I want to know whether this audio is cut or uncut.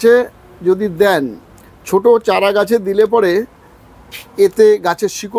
uncut